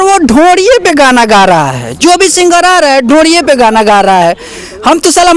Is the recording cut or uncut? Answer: uncut